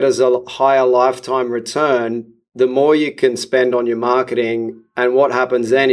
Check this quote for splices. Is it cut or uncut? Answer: uncut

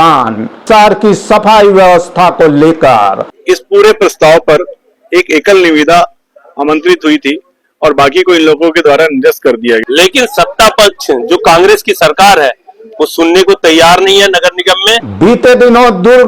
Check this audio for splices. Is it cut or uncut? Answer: cut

